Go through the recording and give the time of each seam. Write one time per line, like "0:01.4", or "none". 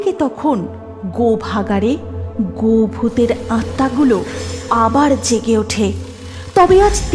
none

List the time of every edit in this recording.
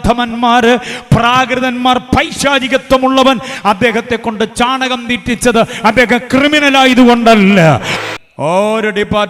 0:07.9

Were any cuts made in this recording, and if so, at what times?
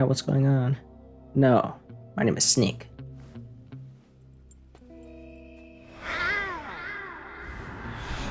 none

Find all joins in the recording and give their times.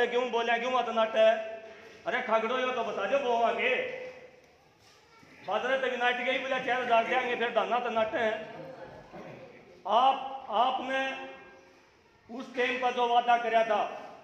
none

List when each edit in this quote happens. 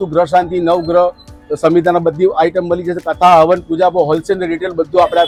none

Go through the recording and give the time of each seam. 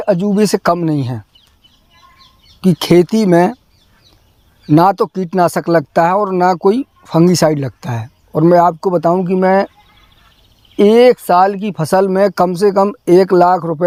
none

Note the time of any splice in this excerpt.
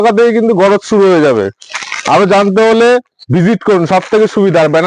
none

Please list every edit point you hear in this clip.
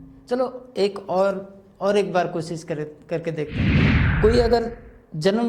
0:03.8

